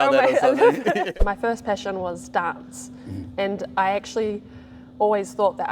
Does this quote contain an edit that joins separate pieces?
yes; 1 cut; at 1.1 s

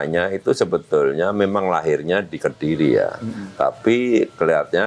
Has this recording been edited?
no; 0 cuts

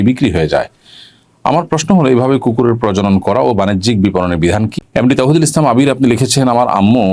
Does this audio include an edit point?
yes; 1 cut; at 4.7 s

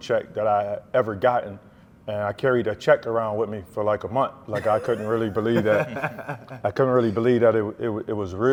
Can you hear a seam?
no; 0 cuts

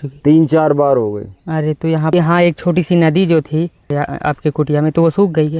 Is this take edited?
yes; 2 cuts; at 2.1 s, 3.9 s

